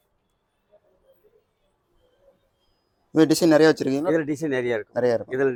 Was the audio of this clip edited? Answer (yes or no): no